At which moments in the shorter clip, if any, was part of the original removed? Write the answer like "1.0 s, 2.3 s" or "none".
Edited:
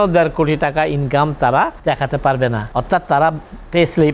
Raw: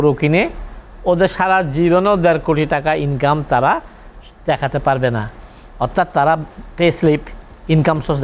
1.8 s, 2.6 s